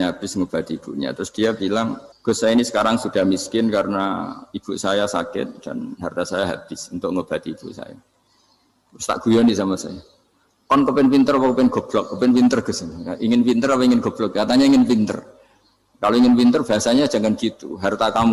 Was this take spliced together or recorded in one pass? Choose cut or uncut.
cut